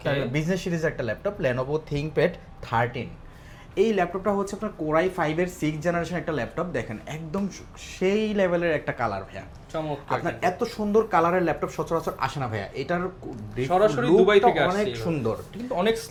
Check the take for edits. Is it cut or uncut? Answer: uncut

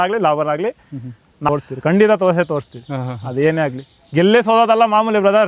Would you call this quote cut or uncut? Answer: cut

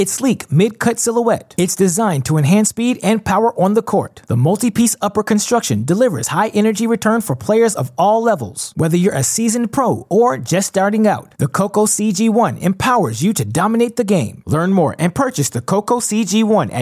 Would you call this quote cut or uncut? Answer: uncut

